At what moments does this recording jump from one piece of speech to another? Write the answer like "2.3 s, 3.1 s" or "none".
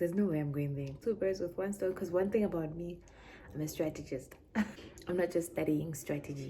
1.0 s, 4.8 s